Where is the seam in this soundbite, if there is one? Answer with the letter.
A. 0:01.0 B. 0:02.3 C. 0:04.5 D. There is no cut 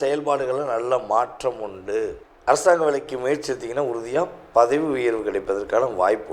B